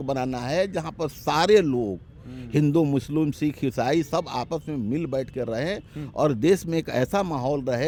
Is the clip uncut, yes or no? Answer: yes